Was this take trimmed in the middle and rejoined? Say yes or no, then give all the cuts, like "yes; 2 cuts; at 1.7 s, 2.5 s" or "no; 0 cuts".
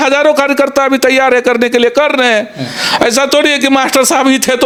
no; 0 cuts